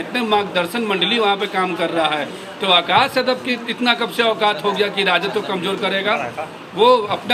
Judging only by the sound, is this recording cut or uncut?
uncut